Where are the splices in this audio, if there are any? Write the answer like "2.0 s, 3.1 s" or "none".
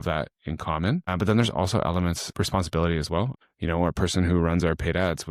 1.1 s, 2.2 s, 3.4 s